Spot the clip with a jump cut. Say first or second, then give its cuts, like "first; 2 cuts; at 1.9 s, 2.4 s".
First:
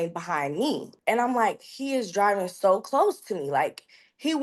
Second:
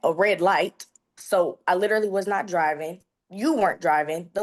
first; 1 cut; at 0.9 s